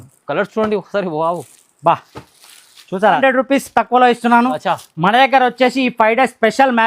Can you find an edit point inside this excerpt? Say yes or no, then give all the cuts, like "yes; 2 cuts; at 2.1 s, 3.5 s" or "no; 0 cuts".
yes; 1 cut; at 3.2 s